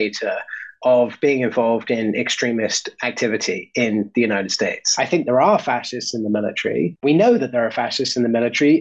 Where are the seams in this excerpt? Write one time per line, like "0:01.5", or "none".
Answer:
0:04.8
0:07.0

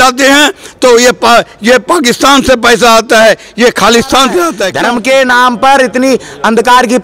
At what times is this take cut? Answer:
0:04.7

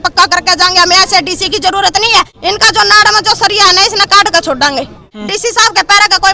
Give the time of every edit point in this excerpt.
0:02.3
0:05.1

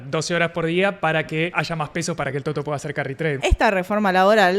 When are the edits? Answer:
0:01.5
0:03.4

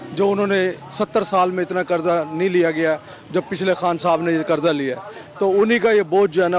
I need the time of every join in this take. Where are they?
none

